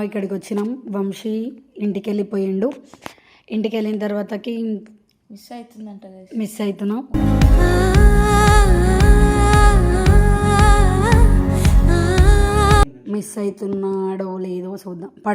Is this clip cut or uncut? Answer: cut